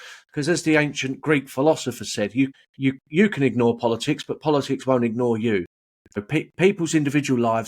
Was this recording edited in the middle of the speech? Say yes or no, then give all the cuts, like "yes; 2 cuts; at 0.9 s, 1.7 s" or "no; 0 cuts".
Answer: yes; 2 cuts; at 2.6 s, 6.2 s